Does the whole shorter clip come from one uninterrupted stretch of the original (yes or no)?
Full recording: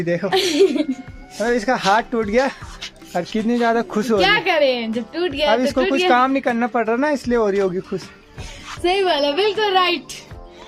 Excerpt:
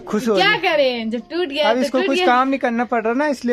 yes